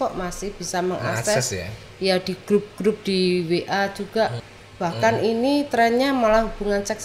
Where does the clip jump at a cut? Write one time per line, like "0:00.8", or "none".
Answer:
0:04.4